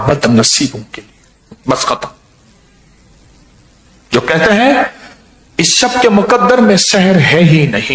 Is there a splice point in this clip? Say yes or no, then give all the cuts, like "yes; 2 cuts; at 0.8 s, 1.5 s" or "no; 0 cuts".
no; 0 cuts